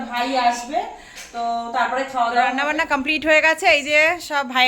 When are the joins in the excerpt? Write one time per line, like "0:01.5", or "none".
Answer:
0:02.7